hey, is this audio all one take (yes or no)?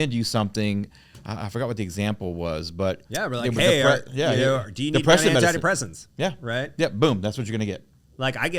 no